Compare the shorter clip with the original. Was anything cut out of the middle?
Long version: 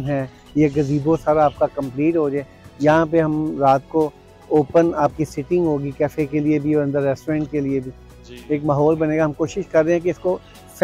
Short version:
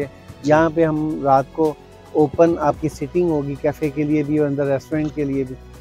no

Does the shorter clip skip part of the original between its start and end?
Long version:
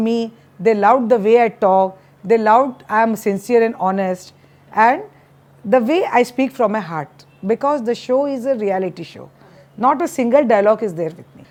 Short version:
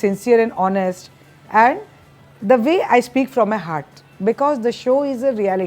no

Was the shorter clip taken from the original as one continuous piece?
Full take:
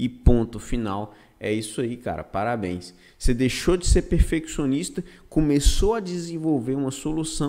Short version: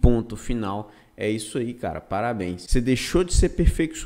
no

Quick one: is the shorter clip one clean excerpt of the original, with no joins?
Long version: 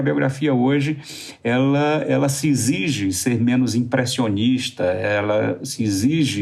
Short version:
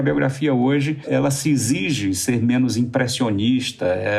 no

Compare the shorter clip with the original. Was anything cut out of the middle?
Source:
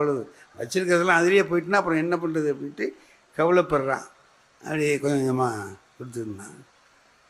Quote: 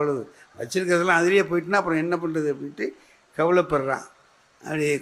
no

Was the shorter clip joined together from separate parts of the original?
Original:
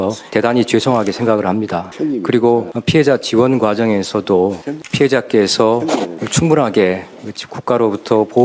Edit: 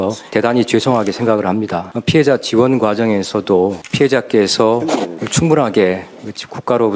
yes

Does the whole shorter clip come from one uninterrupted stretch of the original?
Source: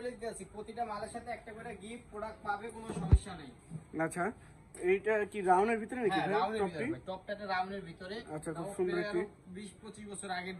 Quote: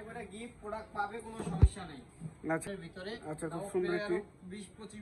no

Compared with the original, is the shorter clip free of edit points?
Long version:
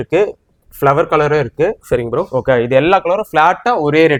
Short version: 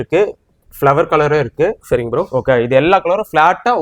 yes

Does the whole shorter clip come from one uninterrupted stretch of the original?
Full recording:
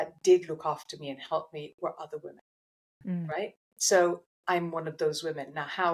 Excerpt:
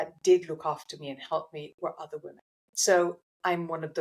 no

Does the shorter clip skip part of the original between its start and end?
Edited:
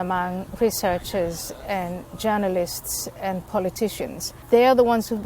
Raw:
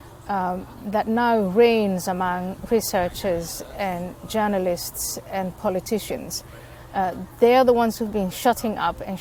yes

